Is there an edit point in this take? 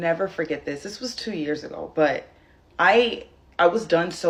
no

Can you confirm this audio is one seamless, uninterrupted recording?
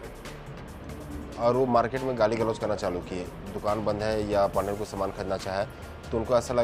yes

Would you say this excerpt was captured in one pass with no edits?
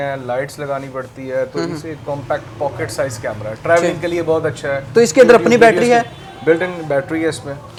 yes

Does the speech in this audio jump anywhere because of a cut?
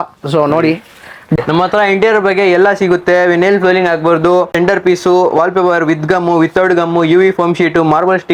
yes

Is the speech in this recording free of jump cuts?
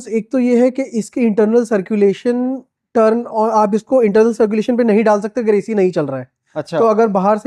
yes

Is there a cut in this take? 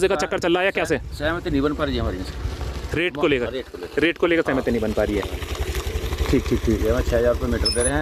no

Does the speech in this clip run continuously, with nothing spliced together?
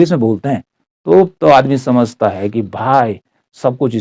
yes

